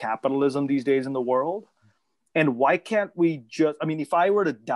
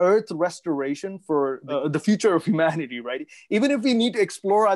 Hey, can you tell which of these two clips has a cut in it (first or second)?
second